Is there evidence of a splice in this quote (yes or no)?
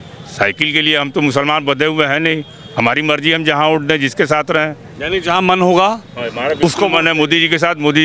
no